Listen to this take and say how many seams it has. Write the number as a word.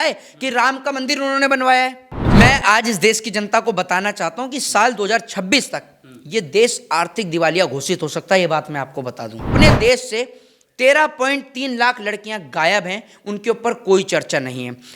two